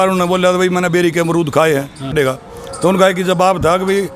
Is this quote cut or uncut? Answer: cut